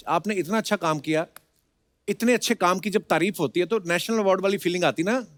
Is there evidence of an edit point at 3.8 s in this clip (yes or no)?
no